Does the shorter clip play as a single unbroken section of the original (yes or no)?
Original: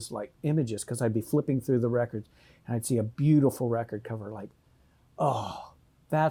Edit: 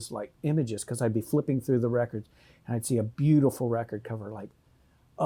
yes